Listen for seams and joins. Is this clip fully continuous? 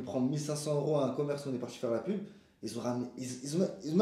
yes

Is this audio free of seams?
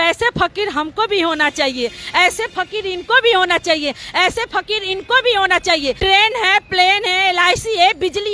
no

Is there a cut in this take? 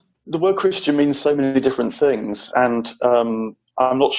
no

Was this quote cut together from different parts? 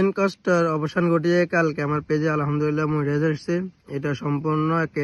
no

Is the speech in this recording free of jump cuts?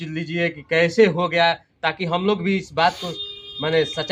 yes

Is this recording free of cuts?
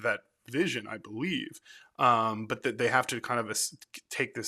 yes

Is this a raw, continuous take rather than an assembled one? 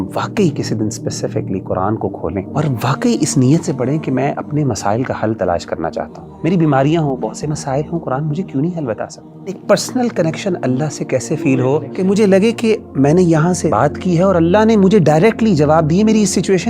no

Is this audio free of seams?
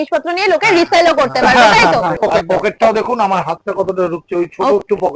no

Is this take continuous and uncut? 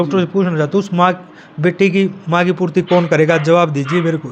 yes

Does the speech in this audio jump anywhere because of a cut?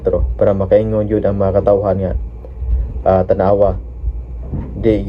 no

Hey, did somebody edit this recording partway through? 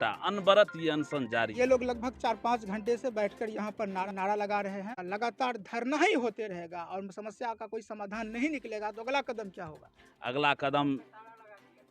yes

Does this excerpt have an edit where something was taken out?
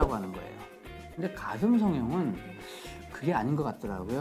yes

